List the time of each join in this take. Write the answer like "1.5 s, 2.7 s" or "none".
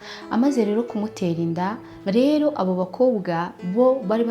1.9 s